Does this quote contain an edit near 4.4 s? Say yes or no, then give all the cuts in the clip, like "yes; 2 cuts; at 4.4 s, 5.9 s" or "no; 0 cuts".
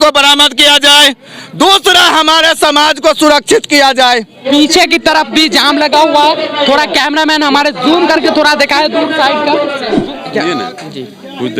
yes; 2 cuts; at 4.4 s, 9.8 s